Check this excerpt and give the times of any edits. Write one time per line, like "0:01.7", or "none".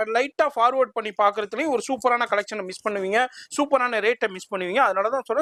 none

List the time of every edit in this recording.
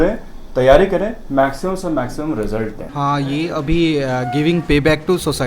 none

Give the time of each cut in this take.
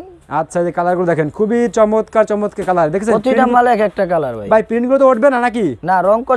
none

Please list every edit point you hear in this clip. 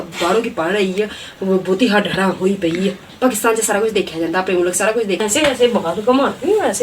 0:05.2

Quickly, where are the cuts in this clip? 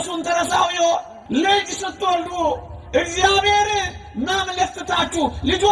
0:01.2

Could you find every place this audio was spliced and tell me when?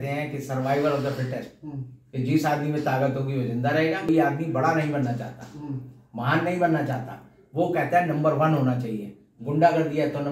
0:04.0

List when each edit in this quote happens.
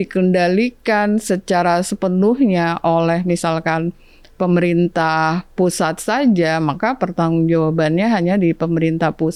none

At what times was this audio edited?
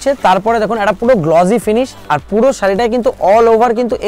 none

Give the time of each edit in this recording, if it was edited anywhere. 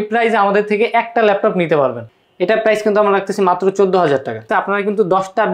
0:02.1
0:04.5

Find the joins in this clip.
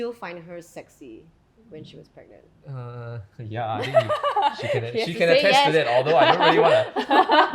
none

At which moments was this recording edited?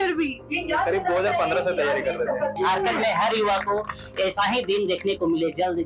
0:02.6

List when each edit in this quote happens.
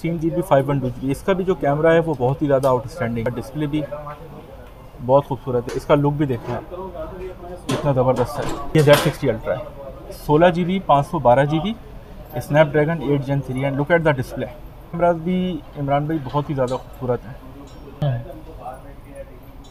0:03.3
0:05.7
0:08.6
0:15.0
0:18.0

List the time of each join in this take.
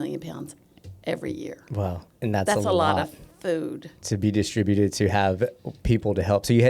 0:02.1

